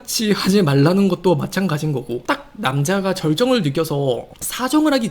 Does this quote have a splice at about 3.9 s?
no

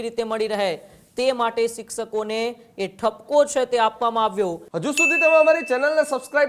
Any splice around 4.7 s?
yes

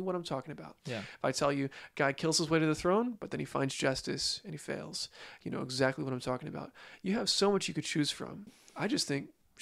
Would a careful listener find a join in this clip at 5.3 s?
no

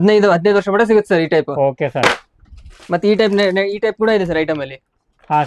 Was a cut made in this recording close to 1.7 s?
no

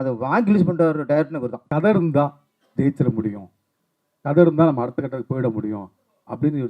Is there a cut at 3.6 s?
no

